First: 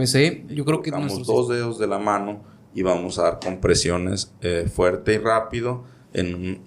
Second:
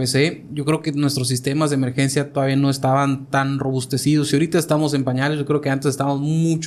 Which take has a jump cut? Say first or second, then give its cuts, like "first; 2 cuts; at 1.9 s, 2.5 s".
first; 1 cut; at 1.0 s